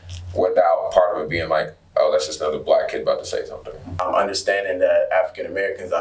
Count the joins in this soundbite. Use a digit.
1